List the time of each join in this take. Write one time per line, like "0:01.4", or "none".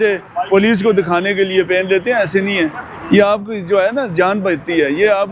none